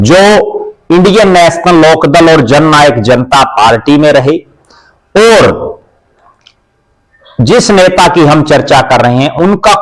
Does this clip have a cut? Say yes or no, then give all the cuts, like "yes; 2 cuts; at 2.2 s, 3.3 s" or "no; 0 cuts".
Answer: no; 0 cuts